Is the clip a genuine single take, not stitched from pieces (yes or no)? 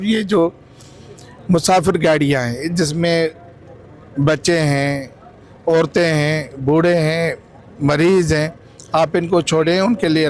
yes